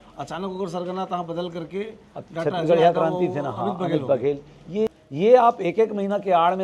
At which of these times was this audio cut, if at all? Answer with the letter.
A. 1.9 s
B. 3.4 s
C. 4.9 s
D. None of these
C